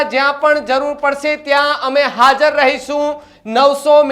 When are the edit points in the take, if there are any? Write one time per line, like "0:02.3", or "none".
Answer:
none